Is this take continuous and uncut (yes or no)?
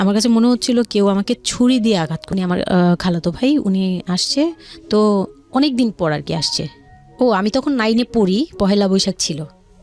no